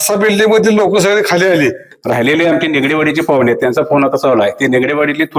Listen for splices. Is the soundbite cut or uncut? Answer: cut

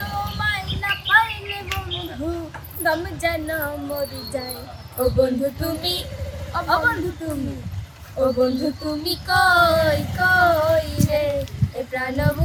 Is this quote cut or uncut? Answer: uncut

